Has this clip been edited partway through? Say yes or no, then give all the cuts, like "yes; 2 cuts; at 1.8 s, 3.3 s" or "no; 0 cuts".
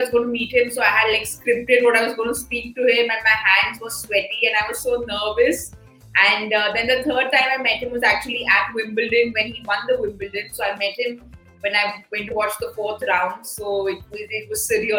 no; 0 cuts